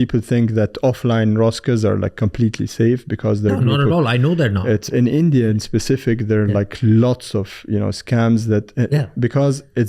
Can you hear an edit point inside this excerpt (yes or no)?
no